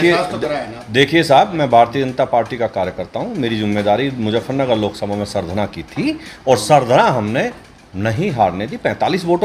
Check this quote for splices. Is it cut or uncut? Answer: uncut